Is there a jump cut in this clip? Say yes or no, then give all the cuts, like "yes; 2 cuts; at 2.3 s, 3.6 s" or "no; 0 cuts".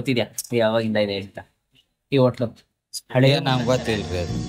no; 0 cuts